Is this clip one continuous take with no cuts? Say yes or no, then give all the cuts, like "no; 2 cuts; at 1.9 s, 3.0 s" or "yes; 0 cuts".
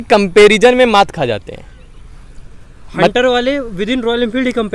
yes; 0 cuts